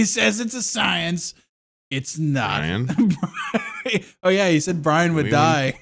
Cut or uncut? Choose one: uncut